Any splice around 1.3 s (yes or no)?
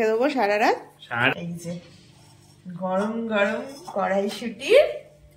yes